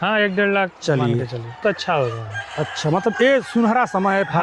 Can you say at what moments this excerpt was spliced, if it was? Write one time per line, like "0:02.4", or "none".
0:01.6